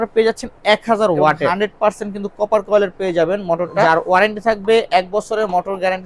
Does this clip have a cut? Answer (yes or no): yes